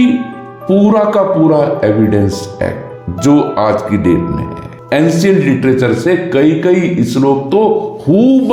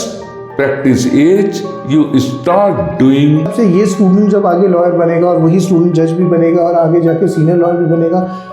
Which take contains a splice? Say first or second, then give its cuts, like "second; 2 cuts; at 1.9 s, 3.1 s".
second; 1 cut; at 3.5 s